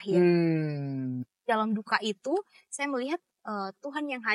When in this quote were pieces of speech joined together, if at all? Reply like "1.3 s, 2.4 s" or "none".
1.4 s